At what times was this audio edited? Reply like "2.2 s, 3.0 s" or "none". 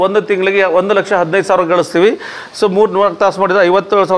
none